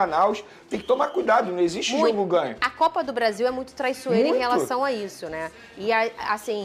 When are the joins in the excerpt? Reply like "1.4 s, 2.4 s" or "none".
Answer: none